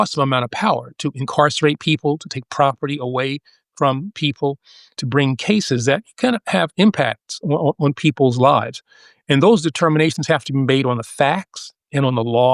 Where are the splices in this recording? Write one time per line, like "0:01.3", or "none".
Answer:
none